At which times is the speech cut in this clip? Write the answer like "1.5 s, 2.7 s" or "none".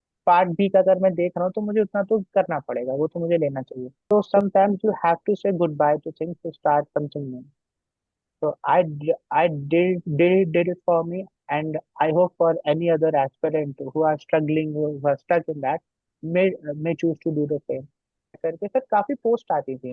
4.3 s, 18.4 s